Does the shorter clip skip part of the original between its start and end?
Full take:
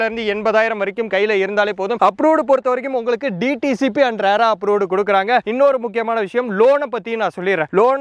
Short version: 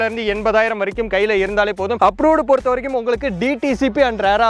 no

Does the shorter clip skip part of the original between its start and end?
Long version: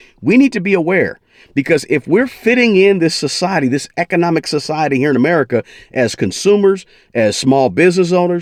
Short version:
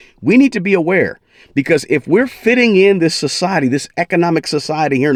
no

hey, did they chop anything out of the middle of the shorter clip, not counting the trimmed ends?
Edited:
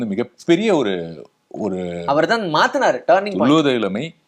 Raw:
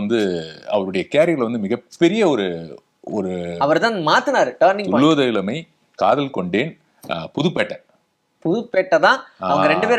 no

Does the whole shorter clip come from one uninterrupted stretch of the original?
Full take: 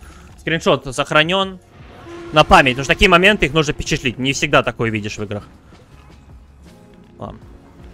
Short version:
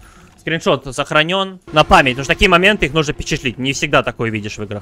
no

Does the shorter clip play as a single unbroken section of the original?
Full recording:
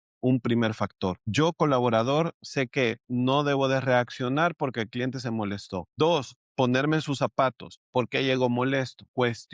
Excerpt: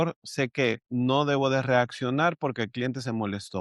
yes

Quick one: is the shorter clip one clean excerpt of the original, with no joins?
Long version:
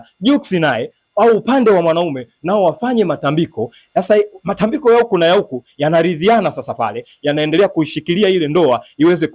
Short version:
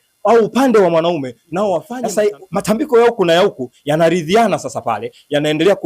no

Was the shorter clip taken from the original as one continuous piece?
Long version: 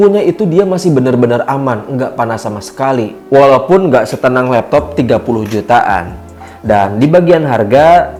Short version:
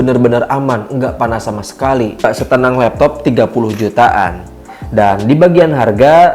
no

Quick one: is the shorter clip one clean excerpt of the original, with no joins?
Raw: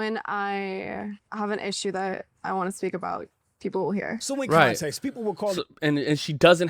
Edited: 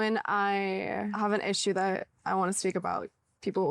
no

